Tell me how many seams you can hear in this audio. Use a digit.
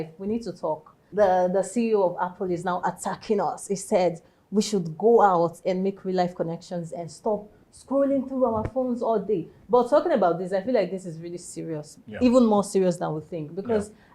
1